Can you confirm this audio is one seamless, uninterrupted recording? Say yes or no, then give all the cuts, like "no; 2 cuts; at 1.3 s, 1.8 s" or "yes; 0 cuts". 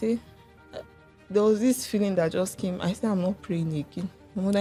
yes; 0 cuts